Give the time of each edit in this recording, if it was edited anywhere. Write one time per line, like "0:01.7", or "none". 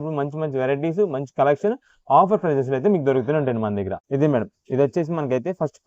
0:04.0